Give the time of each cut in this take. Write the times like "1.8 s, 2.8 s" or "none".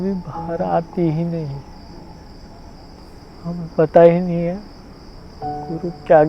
3.0 s

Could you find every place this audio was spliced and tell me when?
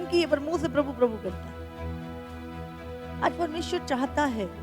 none

